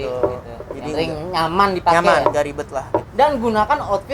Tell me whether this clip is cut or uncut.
cut